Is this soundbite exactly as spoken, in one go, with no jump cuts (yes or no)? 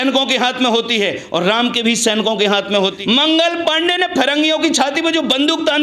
no